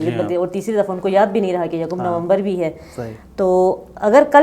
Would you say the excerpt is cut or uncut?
uncut